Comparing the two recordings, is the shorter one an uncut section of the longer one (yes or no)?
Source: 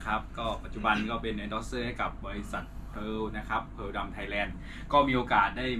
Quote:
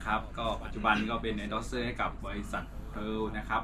yes